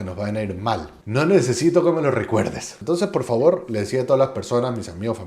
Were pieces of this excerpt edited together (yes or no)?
yes